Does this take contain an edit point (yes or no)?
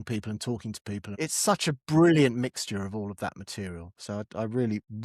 yes